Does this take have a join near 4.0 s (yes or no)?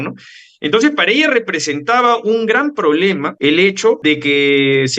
yes